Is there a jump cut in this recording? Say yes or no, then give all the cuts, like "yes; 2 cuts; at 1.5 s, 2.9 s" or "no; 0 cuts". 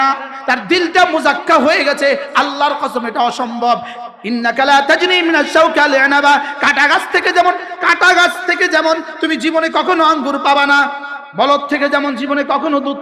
no; 0 cuts